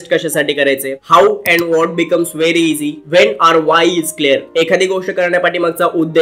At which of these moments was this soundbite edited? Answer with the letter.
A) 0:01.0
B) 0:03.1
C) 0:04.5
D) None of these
D